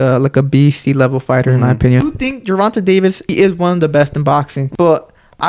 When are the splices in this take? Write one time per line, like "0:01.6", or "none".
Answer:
0:02.0
0:03.3
0:04.6

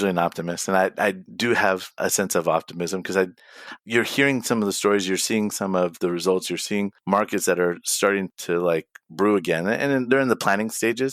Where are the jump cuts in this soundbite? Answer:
0:02.0

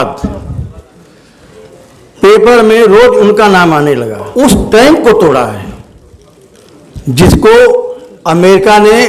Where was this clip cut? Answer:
0:04.2

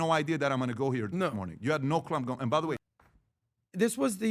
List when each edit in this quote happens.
0:03.0

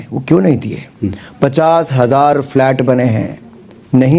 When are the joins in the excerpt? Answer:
none

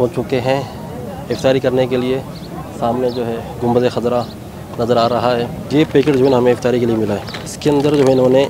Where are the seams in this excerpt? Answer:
0:05.7
0:07.4

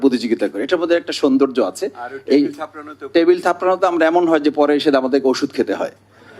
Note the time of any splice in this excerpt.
none

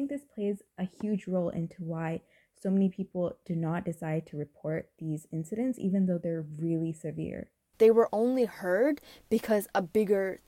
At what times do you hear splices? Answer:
0:07.6

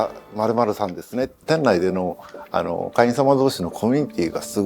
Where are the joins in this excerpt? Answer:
0:01.4

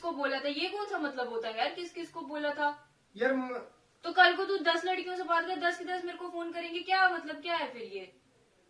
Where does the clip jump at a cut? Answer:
none

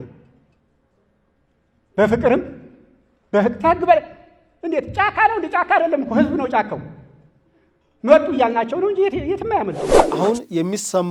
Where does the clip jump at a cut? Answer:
0:09.9

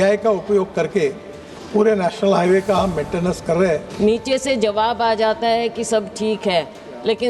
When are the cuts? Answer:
0:03.9

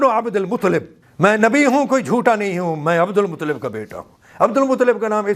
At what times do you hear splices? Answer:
0:01.0

